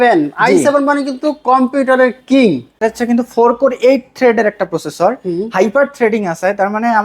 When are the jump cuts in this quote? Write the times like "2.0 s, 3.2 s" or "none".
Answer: 2.8 s